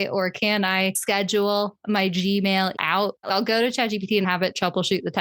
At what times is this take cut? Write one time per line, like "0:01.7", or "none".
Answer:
0:03.0
0:04.3